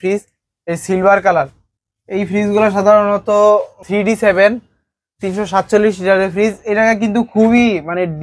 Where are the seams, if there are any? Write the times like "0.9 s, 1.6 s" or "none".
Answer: 3.8 s